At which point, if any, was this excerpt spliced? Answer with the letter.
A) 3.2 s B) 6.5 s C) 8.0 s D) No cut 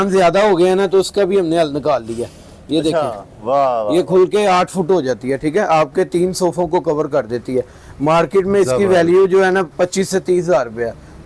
D